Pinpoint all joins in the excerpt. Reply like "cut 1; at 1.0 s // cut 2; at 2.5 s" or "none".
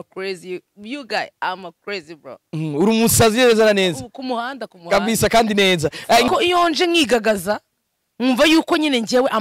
cut 1; at 6.3 s